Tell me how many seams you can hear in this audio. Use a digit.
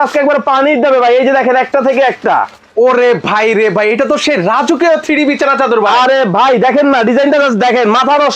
0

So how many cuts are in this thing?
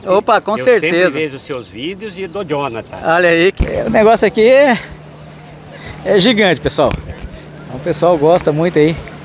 1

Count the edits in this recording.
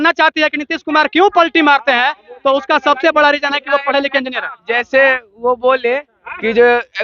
0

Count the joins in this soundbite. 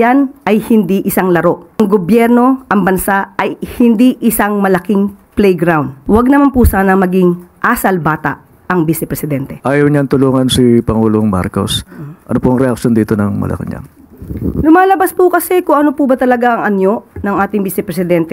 3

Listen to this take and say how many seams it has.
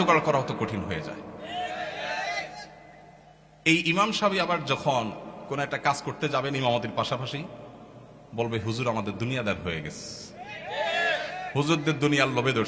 0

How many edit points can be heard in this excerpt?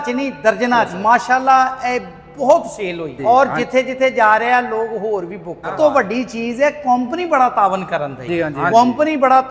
4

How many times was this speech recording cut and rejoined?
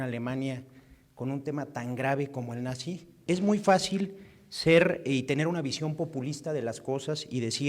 1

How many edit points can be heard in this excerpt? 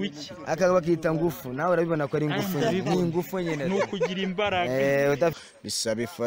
1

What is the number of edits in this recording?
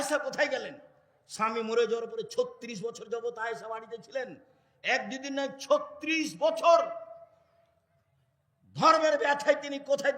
0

